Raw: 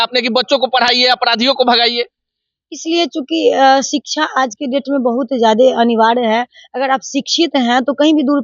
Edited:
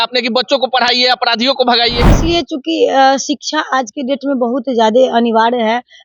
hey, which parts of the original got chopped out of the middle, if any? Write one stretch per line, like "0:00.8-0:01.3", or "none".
0:02.1-0:02.7